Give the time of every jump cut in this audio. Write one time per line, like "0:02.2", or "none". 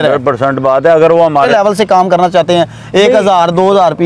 0:01.5